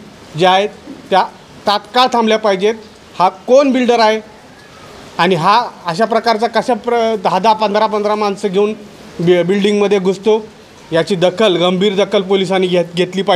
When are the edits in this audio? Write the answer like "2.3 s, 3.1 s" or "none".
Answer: none